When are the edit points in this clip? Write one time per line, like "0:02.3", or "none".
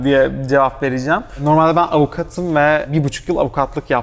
0:01.4
0:02.9